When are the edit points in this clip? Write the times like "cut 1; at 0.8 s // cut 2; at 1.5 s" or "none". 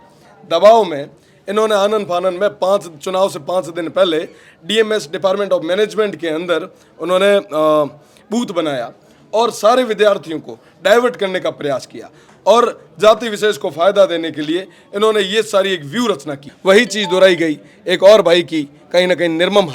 cut 1; at 16.4 s